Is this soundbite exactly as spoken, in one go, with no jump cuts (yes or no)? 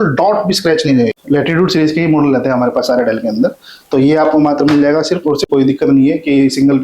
no